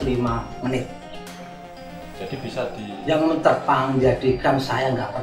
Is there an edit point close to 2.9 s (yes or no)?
yes